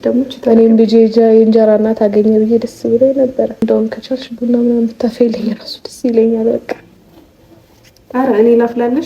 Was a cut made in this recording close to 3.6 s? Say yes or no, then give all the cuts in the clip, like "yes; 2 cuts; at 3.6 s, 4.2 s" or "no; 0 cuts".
yes; 1 cut; at 3.6 s